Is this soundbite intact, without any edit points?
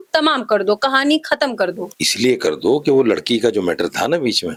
yes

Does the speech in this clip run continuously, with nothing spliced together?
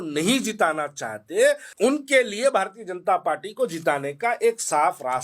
no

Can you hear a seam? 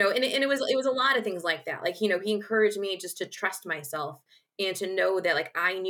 no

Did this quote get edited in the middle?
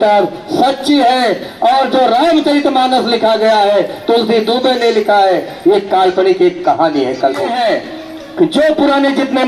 yes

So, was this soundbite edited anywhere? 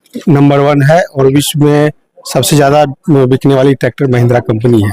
no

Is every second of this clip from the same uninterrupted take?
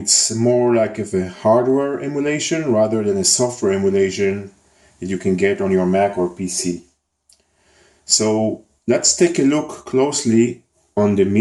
no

